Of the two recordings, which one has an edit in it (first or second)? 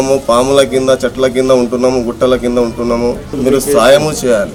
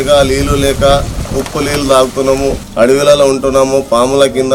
second